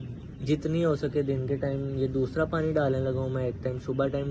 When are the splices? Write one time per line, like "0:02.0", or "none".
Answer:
none